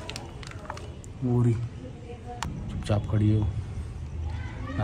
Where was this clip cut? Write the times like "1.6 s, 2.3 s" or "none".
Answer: 2.5 s